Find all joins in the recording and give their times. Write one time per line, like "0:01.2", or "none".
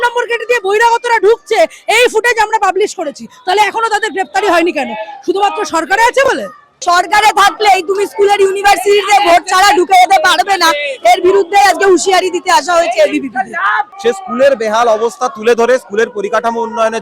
0:06.8
0:13.9